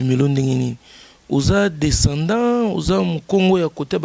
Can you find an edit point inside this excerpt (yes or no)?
no